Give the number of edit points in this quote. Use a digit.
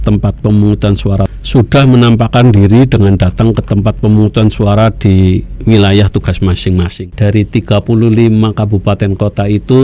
2